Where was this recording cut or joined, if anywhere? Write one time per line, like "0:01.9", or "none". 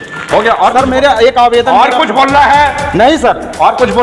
none